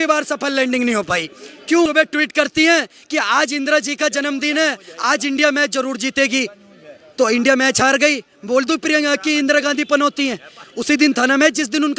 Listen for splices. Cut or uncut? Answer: cut